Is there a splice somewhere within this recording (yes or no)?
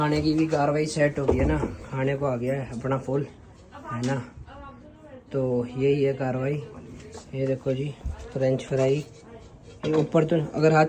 no